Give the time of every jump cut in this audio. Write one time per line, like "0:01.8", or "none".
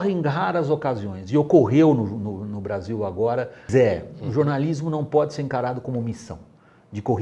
0:03.6

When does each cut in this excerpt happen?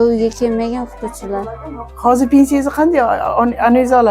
none

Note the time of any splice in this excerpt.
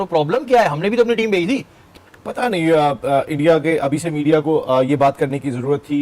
0:01.8

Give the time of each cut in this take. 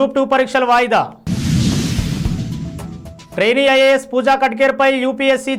none

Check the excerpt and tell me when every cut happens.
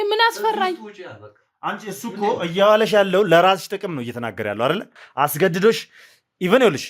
0:05.0

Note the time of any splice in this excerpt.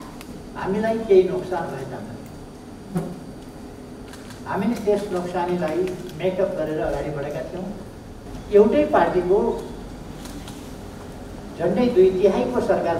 0:08.2

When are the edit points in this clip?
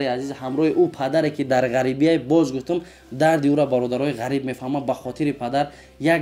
none

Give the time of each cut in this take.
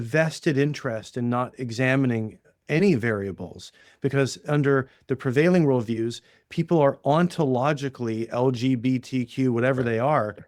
none

